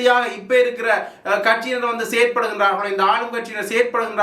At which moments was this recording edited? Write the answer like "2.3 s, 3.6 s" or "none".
none